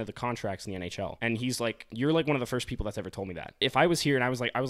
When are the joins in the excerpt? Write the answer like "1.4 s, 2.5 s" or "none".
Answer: 1.1 s, 1.8 s, 3.6 s